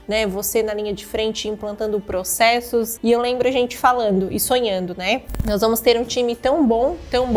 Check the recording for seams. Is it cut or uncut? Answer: cut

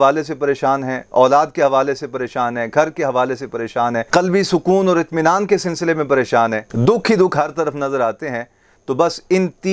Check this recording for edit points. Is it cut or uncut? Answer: uncut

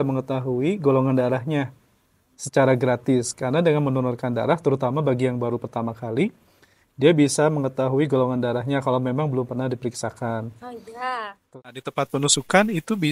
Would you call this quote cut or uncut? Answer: cut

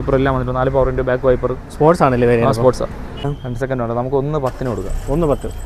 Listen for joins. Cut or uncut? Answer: cut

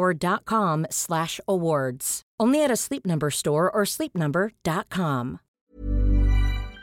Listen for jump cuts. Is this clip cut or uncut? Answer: cut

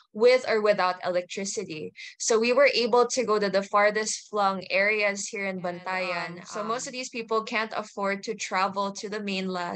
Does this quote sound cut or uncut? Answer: cut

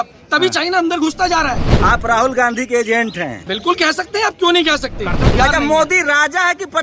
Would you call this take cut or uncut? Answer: cut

